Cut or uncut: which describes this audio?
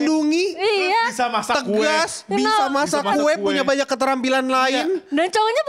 uncut